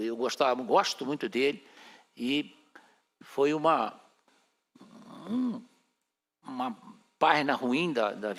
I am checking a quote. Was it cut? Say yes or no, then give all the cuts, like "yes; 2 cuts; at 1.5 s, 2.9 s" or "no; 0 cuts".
no; 0 cuts